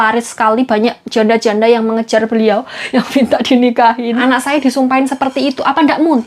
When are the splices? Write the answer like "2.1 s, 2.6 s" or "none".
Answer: 2.8 s, 4.1 s